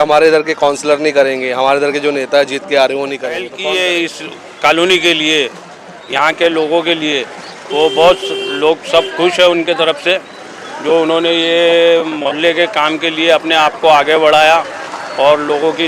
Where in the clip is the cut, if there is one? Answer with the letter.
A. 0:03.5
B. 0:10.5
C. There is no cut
A